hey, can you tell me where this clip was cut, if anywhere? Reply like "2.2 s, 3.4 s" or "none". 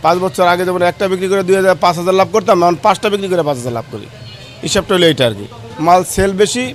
none